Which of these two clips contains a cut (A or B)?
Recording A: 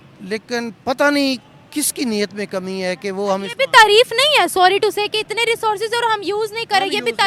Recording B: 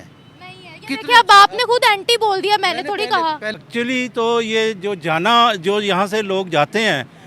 B